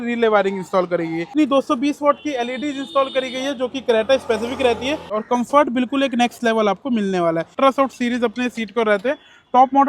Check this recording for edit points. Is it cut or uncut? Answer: cut